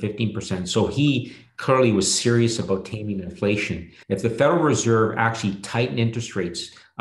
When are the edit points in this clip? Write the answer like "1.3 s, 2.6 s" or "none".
3.9 s